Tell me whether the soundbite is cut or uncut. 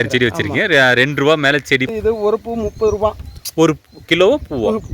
cut